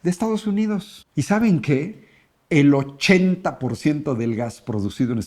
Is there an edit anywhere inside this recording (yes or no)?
yes